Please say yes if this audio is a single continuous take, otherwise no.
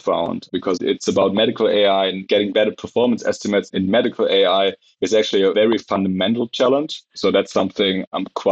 no